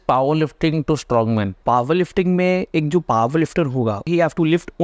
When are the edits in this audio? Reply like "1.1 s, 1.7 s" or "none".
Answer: 1.6 s, 4.1 s